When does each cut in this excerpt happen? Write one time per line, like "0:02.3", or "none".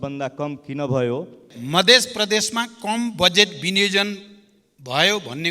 0:01.6